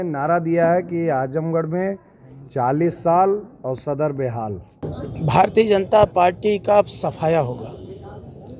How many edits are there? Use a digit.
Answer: 1